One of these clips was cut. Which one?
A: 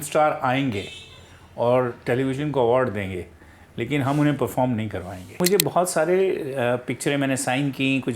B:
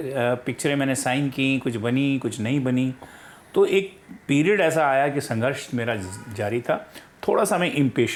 A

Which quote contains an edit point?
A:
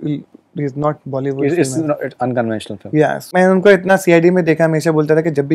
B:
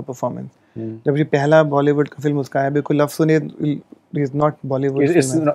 A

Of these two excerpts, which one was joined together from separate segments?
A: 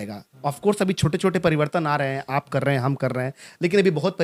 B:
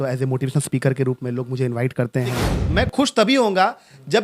B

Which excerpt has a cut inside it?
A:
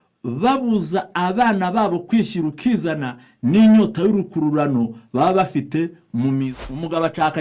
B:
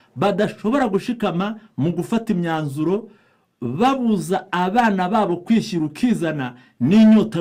A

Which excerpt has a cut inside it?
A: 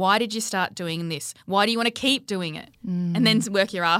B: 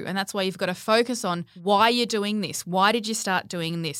B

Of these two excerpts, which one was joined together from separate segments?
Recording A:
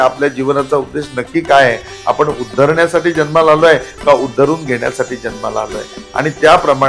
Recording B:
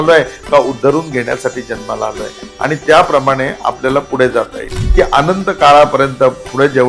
B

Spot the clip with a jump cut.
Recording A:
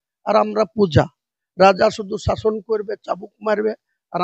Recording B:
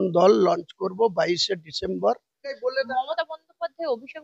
B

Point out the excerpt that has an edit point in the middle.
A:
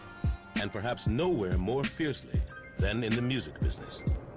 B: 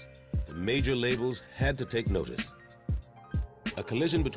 A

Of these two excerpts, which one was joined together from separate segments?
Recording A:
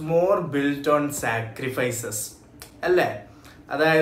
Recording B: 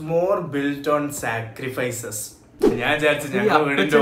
B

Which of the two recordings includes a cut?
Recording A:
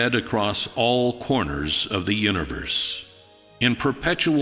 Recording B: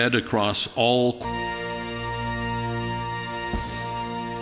A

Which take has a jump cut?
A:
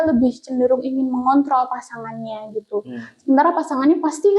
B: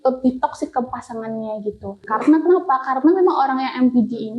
B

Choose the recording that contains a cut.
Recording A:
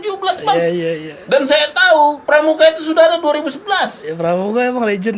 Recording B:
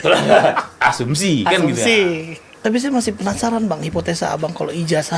B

